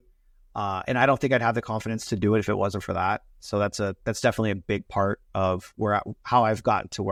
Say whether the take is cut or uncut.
uncut